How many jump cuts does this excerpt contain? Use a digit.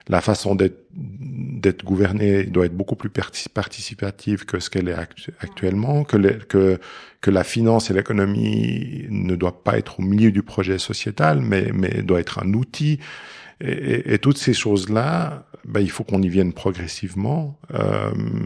0